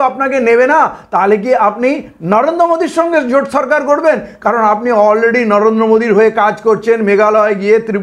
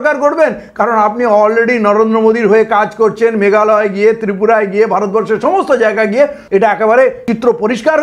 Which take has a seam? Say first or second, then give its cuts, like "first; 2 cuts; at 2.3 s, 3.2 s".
second; 2 cuts; at 6.4 s, 7.2 s